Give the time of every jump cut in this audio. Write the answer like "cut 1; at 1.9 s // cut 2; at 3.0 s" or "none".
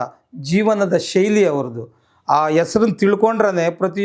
none

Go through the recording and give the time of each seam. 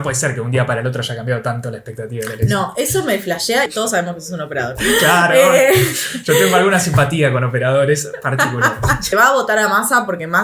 cut 1; at 3.7 s // cut 2; at 9.1 s

